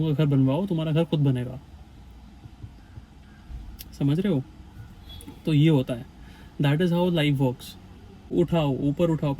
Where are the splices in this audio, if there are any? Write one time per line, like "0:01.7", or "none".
0:08.3